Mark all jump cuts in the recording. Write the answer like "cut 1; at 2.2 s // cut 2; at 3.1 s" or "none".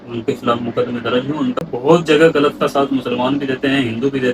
cut 1; at 1.6 s